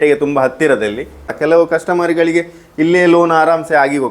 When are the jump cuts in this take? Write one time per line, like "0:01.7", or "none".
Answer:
0:01.3